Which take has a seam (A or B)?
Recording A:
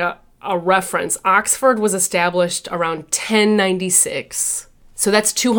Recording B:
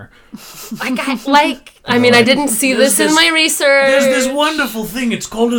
B